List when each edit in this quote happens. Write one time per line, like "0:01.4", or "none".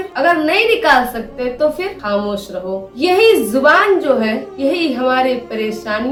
none